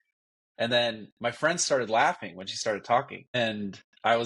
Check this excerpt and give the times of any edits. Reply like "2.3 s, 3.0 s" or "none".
none